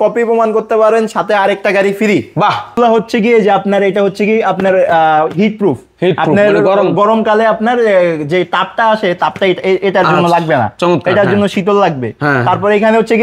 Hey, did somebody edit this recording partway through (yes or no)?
yes